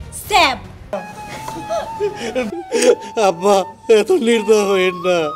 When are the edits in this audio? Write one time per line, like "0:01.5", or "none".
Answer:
0:00.9